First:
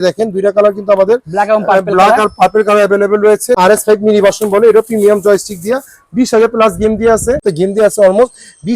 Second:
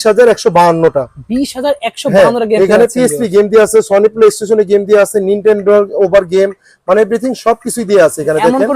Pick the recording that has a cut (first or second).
first